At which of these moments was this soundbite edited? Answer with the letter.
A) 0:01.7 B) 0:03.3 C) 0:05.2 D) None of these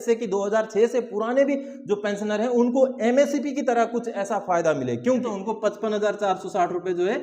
C